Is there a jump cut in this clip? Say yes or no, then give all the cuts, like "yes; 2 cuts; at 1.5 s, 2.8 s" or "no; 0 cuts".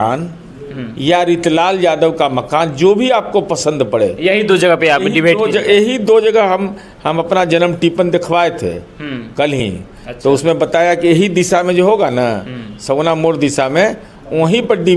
no; 0 cuts